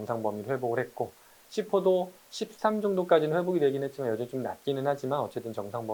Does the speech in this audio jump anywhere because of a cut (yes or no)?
no